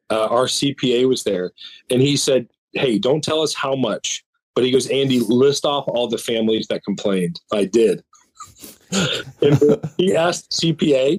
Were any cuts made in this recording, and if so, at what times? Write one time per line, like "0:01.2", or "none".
none